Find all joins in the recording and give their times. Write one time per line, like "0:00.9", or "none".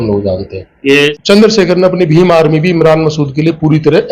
0:01.1